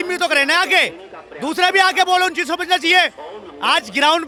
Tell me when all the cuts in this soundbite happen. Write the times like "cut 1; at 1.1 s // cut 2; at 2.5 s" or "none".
none